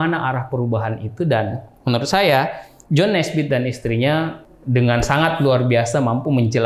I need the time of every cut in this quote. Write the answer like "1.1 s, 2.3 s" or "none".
4.4 s